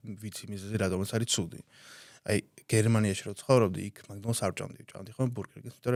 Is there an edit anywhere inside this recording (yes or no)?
no